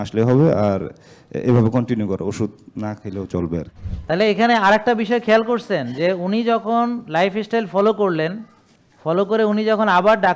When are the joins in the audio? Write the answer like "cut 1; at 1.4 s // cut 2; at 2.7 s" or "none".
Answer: cut 1; at 3.8 s